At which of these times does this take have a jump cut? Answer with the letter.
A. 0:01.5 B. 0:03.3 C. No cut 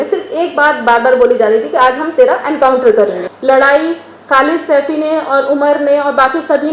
B